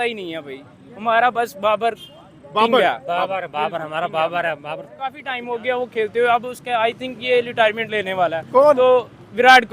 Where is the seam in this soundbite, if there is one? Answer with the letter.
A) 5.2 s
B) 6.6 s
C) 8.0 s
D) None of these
A